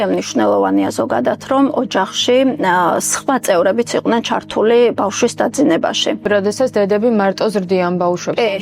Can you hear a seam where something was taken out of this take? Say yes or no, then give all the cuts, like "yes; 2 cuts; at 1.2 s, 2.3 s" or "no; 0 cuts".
yes; 1 cut; at 6.2 s